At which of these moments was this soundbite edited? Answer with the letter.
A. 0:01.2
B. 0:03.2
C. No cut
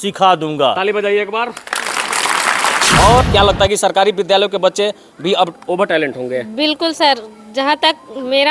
B